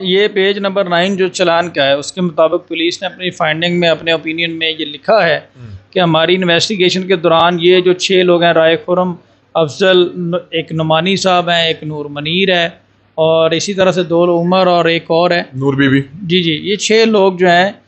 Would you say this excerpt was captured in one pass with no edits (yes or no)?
yes